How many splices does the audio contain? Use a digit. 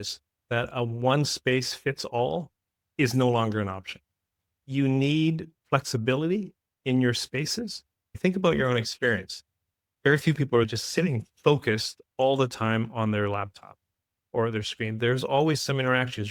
0